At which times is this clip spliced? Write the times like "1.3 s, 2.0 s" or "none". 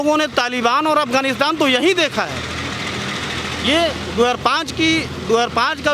none